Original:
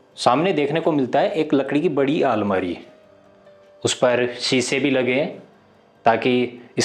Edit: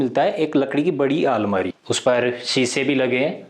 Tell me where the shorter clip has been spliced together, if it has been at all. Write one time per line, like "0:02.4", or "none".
0:02.1